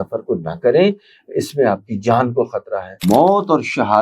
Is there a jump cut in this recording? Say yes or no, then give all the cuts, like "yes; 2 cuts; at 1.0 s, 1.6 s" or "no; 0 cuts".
yes; 1 cut; at 3.0 s